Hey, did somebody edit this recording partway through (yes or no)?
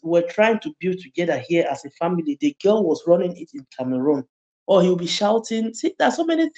yes